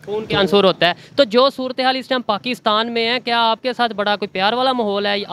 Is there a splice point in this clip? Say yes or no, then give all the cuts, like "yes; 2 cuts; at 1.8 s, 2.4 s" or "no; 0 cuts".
no; 0 cuts